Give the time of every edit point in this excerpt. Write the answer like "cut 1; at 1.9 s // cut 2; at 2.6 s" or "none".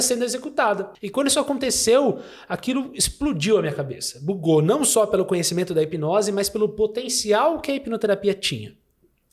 cut 1; at 1.0 s